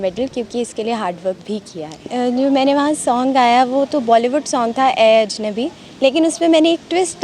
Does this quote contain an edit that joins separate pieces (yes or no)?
yes